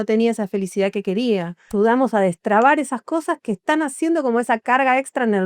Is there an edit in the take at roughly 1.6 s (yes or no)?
yes